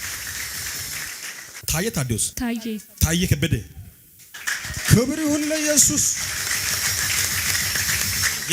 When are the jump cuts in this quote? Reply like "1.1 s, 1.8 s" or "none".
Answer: 1.6 s, 2.3 s